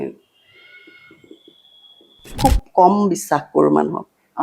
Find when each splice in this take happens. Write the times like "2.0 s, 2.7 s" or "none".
2.4 s